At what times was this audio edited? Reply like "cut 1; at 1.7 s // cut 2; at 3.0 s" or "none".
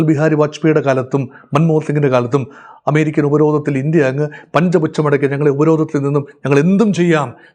none

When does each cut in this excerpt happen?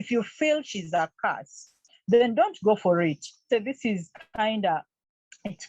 cut 1; at 3.4 s

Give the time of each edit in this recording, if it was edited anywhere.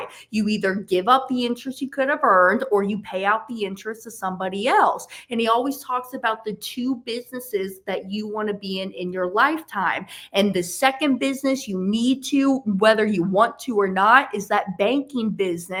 none

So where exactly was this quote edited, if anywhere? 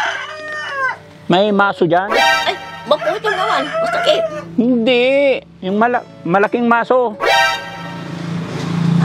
cut 1; at 2.3 s

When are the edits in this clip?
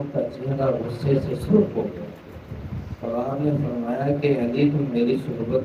none

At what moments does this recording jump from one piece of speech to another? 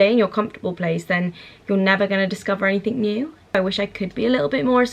cut 1; at 3.5 s

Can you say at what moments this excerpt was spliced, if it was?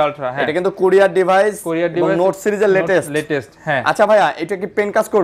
none

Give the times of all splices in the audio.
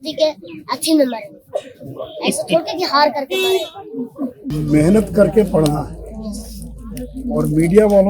cut 1; at 4.5 s

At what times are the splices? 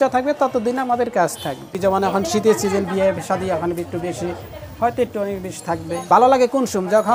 cut 1; at 1.7 s // cut 2; at 5.9 s

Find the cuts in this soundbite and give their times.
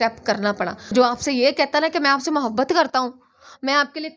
cut 1; at 0.9 s

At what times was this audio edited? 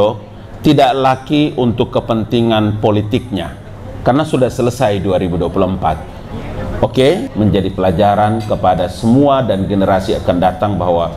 cut 1; at 7.3 s

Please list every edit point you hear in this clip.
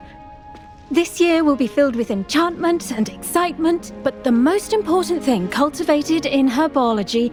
none

